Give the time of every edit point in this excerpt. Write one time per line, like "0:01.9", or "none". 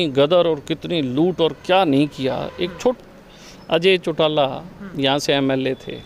0:03.0

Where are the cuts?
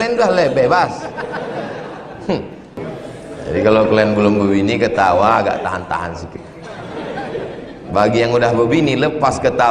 0:02.8

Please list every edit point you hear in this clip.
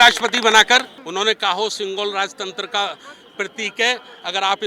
0:01.0

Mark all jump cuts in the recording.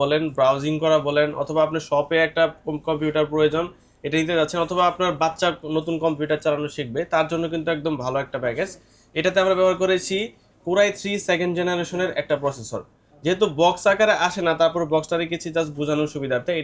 none

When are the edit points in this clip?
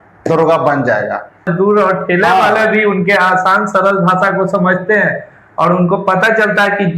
0:01.5

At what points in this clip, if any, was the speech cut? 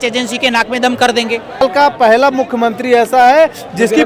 0:01.6

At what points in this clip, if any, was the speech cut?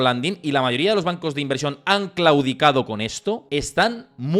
0:03.4

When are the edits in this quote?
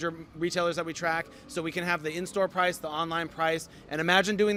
none

